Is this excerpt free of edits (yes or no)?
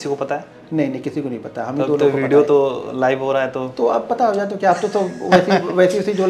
yes